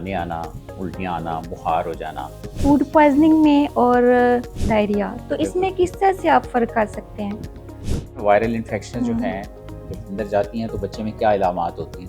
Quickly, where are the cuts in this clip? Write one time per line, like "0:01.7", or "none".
0:02.6
0:04.6